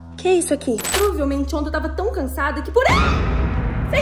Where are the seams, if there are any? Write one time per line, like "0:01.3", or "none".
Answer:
0:00.9